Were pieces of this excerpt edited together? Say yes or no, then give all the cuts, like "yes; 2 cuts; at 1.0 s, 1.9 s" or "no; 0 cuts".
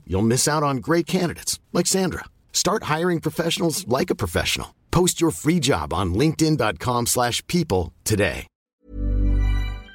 yes; 1 cut; at 8.8 s